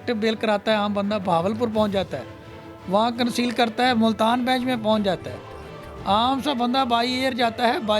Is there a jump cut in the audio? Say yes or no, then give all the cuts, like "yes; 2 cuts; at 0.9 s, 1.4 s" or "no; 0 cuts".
no; 0 cuts